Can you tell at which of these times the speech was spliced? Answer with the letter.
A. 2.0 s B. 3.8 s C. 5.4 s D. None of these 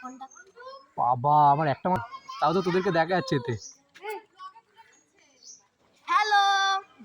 A